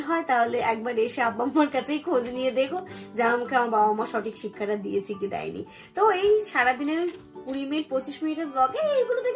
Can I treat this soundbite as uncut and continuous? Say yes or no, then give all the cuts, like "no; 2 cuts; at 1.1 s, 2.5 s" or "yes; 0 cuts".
yes; 0 cuts